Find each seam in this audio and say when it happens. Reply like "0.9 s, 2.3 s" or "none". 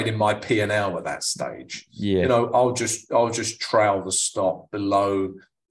none